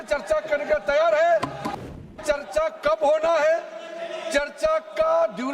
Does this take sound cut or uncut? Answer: cut